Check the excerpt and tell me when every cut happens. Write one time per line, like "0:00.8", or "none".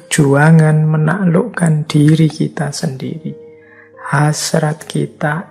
none